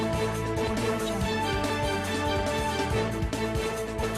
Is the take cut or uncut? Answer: cut